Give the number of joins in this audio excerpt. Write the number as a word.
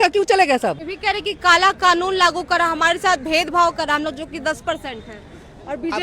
one